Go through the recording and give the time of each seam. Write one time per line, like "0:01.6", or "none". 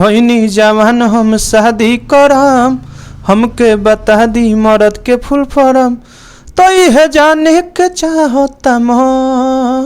none